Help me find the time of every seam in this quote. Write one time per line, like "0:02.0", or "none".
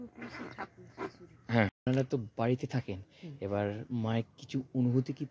0:01.9